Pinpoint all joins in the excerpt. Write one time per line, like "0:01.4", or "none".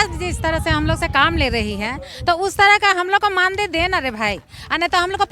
none